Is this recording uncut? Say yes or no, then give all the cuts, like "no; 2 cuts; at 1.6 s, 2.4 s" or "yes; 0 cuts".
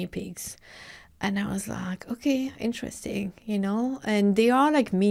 yes; 0 cuts